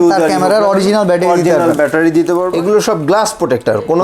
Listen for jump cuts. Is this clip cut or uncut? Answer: cut